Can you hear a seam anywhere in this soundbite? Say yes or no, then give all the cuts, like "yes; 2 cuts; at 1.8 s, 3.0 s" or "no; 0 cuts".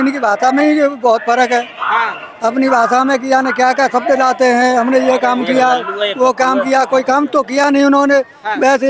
no; 0 cuts